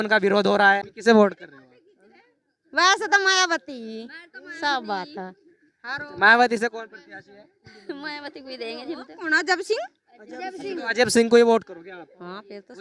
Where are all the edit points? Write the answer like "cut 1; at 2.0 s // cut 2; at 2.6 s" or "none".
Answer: cut 1; at 0.9 s